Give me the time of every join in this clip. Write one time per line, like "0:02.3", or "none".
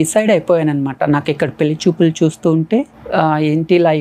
0:03.0

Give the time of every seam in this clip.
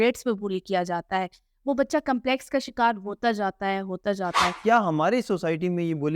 0:04.6

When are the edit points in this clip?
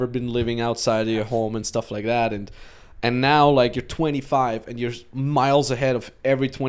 none

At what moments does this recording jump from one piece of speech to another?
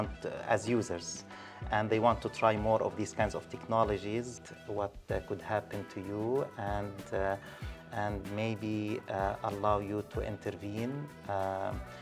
0:04.4

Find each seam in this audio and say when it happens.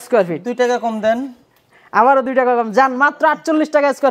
none

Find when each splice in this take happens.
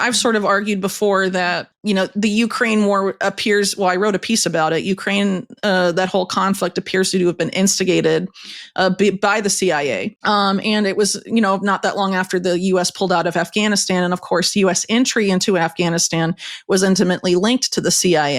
0:01.7
0:10.1

